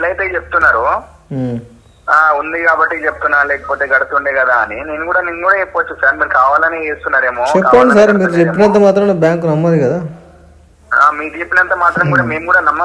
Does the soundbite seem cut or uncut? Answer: uncut